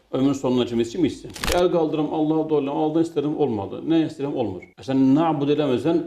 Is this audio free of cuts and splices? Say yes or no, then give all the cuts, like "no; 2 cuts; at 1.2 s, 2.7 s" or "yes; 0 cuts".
no; 1 cut; at 1.4 s